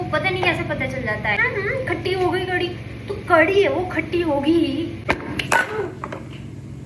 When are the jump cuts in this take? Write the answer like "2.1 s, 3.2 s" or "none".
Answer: 1.4 s, 4.9 s